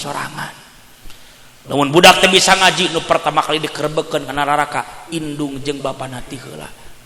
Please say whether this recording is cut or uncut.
uncut